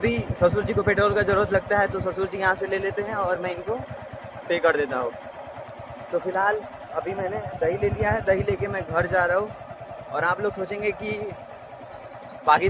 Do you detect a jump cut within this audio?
no; 0 cuts

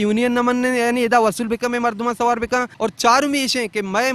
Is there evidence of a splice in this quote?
yes; 1 cut; at 2.7 s

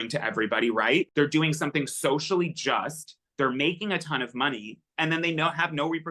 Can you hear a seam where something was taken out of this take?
yes; 1 cut; at 1.1 s

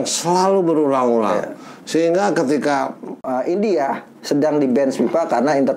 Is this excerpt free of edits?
no; 1 cut; at 3.2 s

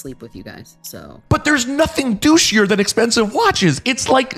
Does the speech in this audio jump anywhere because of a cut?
yes; 1 cut; at 1.1 s

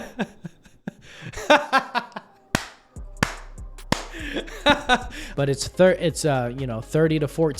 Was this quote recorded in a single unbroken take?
no; 1 cut; at 5.2 s

